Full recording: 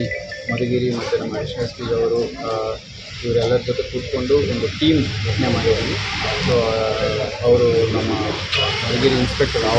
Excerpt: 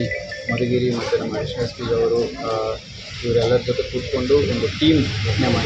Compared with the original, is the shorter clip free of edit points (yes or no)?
yes